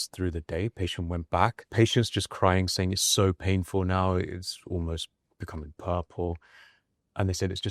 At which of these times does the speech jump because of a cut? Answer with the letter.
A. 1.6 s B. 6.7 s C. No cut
A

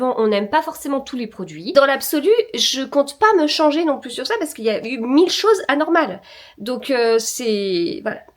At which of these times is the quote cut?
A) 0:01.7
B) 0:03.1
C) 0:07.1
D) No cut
A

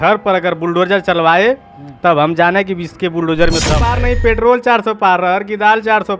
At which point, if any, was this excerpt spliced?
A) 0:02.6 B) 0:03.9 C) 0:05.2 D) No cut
B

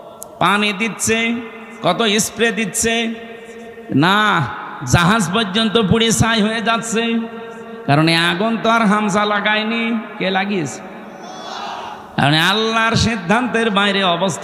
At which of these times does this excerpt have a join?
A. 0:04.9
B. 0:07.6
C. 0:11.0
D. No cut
D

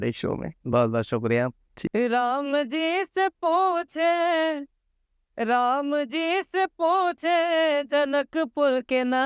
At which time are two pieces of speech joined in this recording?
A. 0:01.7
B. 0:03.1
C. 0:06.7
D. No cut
A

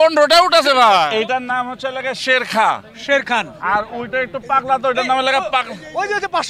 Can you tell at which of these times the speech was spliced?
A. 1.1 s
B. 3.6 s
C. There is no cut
A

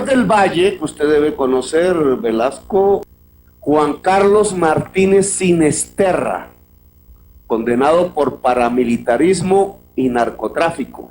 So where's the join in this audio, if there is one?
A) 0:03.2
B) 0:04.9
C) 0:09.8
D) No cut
A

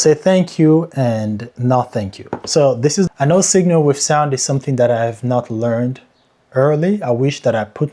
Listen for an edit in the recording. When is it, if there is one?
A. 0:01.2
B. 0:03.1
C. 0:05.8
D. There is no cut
B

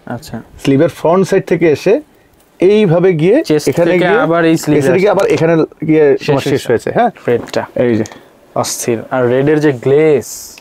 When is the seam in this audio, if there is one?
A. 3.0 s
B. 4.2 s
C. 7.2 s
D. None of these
C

